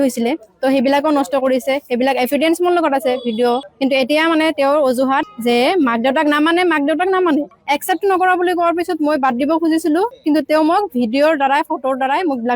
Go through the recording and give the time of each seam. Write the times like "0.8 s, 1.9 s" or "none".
3.6 s, 7.6 s